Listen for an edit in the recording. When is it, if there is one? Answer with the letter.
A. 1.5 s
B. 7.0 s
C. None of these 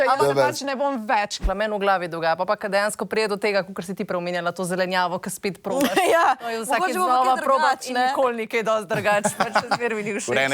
A